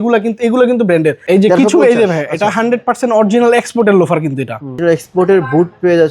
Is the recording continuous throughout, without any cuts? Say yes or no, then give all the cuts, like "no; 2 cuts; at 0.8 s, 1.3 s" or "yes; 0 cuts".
no; 2 cuts; at 1.2 s, 4.8 s